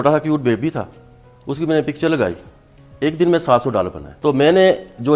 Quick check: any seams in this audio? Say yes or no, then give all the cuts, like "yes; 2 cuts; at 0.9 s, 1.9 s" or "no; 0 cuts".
yes; 1 cut; at 4.1 s